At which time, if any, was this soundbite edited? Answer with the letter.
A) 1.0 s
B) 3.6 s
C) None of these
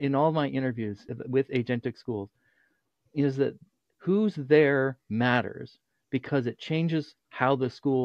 A